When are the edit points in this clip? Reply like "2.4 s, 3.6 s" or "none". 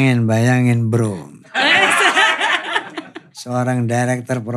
none